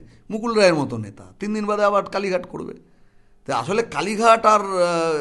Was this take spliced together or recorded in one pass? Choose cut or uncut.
uncut